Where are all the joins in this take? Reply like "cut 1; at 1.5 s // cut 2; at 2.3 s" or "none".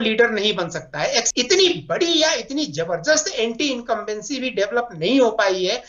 cut 1; at 1.3 s